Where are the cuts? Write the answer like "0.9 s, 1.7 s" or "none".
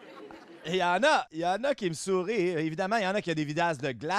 1.3 s

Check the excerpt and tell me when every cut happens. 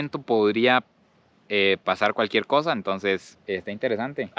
none

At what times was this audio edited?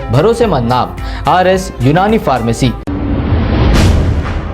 2.9 s

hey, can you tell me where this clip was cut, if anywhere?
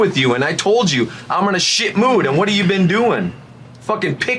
none

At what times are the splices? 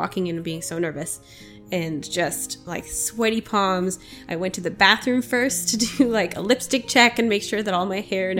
none

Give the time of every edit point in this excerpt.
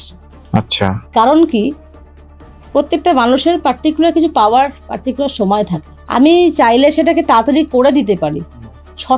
5.9 s

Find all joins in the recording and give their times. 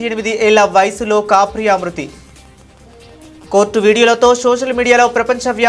none

